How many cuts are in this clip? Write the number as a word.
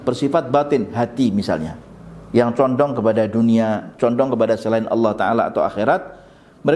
zero